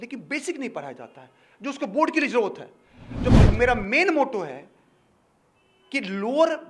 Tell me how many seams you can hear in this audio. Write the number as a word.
one